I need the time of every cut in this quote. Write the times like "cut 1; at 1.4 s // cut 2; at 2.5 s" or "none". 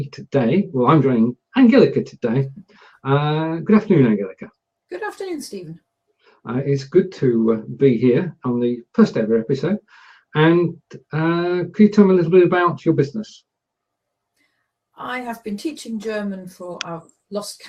cut 1; at 12.8 s